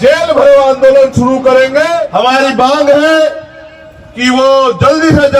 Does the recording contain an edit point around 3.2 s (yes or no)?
no